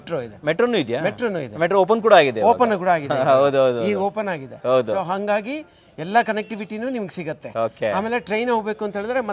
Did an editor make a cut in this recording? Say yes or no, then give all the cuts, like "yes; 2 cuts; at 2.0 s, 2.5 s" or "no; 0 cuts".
no; 0 cuts